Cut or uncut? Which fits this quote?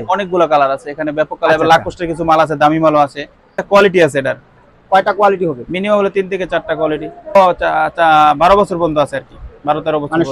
cut